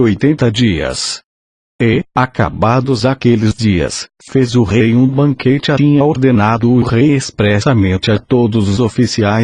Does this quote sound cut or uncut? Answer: uncut